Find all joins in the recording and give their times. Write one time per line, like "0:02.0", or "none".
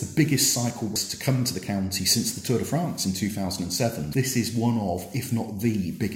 0:04.1